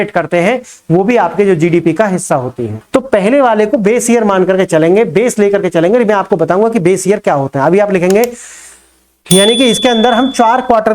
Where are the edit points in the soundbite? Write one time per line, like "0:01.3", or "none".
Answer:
0:02.8